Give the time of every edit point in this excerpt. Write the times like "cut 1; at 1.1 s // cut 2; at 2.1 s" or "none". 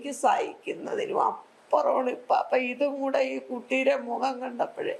none